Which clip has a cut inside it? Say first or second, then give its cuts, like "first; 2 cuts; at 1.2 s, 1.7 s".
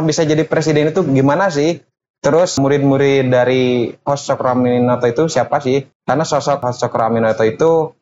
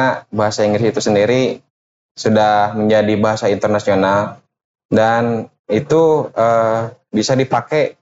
first; 3 cuts; at 2.6 s, 5.9 s, 6.6 s